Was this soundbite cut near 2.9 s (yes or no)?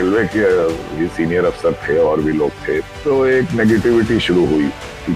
yes